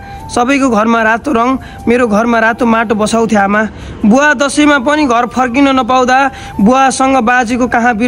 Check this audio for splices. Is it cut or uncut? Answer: uncut